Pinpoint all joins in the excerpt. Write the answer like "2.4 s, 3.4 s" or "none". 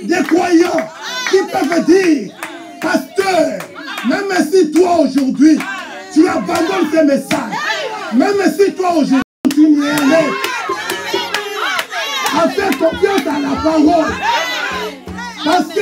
9.3 s